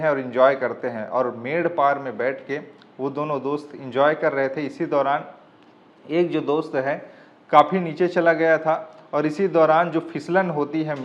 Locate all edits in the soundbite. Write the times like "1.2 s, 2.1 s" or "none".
none